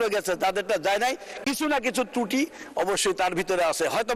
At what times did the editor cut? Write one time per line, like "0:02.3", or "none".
none